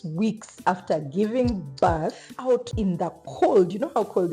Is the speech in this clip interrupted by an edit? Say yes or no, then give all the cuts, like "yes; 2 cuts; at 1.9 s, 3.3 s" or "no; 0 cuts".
yes; 1 cut; at 2.5 s